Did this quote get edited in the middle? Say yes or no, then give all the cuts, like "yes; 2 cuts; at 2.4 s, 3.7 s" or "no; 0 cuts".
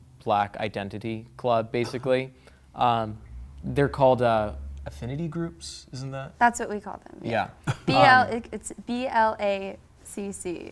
no; 0 cuts